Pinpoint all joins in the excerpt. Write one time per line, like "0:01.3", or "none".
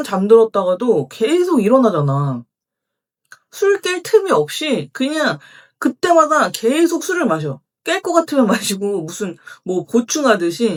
none